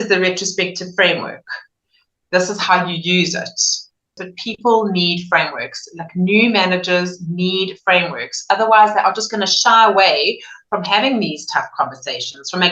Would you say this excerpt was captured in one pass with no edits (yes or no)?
no